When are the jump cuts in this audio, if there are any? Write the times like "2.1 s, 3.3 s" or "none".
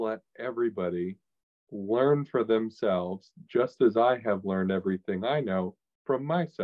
none

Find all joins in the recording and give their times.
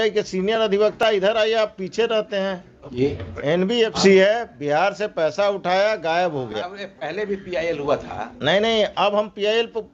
3.0 s

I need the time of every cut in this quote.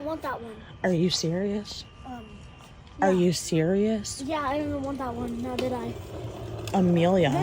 1.1 s

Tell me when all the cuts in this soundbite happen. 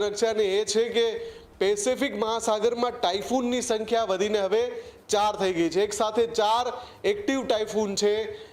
none

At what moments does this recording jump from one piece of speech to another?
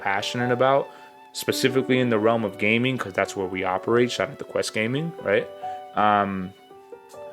none

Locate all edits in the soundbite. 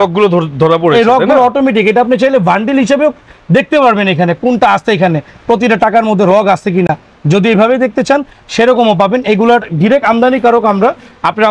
none

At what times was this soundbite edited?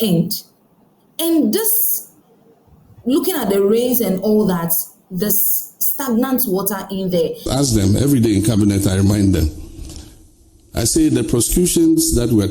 7.4 s

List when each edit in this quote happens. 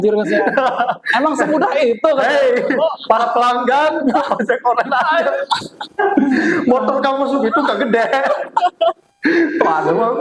none

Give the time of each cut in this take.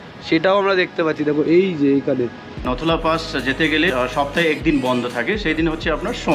2.7 s

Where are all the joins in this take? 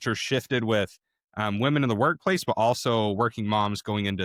none

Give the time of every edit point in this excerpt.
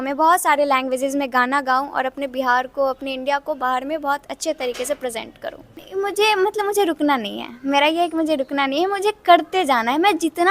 none

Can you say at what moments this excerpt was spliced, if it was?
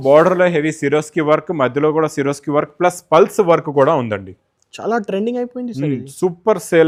none

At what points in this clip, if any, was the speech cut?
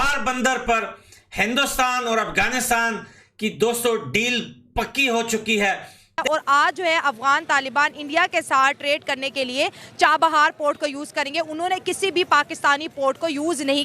6.2 s

